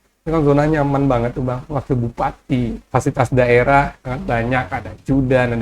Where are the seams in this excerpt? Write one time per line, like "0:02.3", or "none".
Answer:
0:02.8
0:04.1